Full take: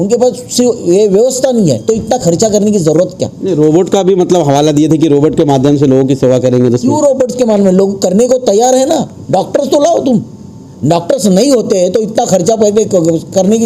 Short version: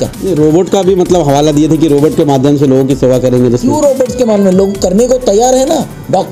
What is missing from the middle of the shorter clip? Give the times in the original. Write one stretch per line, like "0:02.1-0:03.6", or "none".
none